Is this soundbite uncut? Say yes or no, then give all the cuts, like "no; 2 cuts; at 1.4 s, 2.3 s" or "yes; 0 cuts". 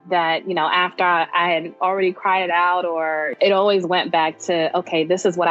no; 1 cut; at 3.3 s